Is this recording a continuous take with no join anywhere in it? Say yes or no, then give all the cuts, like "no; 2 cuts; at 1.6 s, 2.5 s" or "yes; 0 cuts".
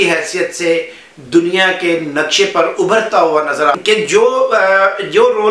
no; 1 cut; at 3.8 s